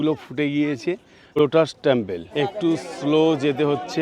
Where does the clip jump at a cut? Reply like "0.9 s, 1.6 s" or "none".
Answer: 1.1 s, 2.2 s